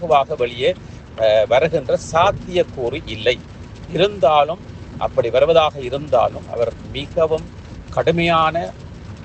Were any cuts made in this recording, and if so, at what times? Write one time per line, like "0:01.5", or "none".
none